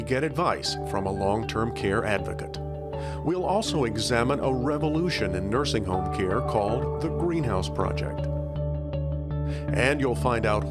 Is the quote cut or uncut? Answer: uncut